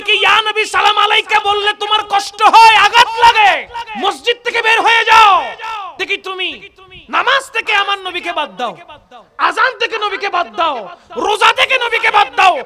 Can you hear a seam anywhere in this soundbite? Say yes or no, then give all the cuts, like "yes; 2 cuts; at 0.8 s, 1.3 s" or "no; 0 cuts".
yes; 1 cut; at 3.8 s